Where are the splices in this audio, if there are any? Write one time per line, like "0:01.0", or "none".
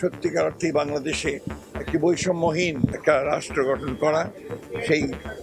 0:03.0